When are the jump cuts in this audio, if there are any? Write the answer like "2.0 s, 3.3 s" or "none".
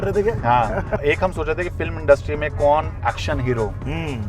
1.0 s